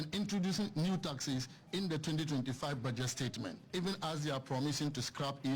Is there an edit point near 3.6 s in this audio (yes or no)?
yes